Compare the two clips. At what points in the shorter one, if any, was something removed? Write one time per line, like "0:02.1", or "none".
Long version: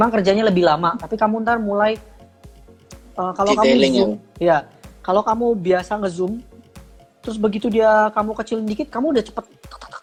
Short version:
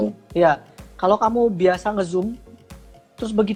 none